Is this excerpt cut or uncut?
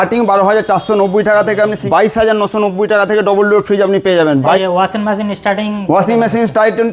cut